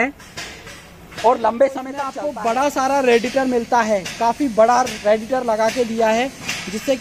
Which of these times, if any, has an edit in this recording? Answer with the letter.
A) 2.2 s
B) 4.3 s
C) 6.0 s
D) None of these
A